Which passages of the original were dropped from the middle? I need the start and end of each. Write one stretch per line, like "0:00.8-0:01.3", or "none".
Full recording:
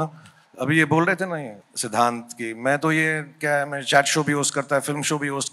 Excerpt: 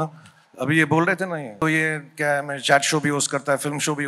0:01.6-0:02.8

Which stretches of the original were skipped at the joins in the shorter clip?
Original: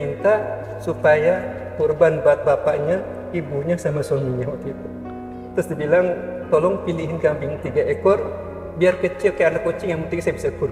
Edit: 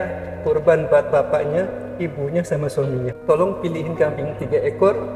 0:04.5-0:06.4

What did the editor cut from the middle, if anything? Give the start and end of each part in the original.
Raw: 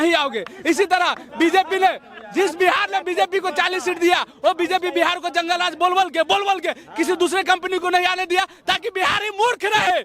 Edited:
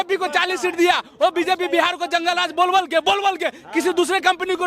none

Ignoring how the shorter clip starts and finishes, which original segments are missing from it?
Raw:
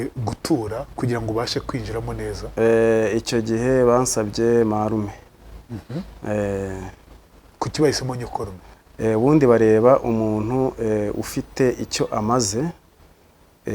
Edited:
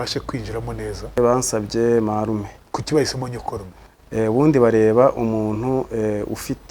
0:02.6-0:03.8
0:05.2-0:07.4

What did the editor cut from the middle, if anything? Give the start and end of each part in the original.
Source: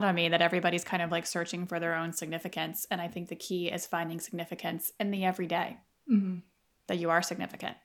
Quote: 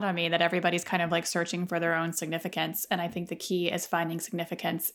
none

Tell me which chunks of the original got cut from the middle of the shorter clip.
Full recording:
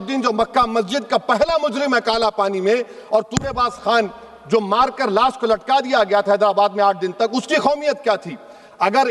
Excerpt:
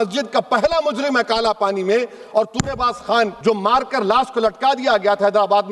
0:04.1-0:04.4

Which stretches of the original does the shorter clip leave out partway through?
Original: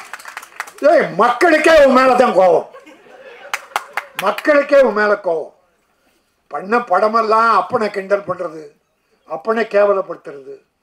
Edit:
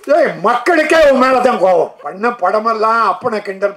0:02.8-0:06.5

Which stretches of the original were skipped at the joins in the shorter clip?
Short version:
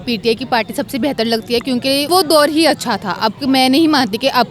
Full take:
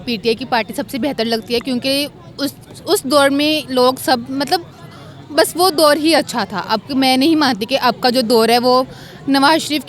0:02.1-0:05.5

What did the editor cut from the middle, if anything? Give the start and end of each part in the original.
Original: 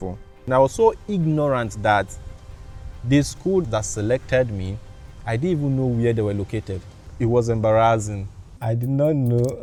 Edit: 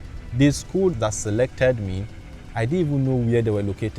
none

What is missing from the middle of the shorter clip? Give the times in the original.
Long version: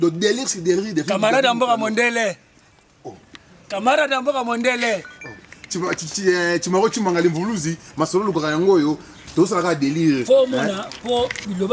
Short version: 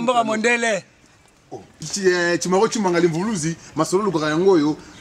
0:03.4-0:06.1

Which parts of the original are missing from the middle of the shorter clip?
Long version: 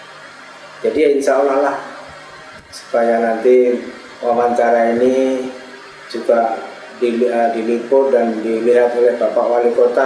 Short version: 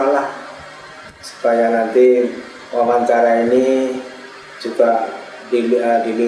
none

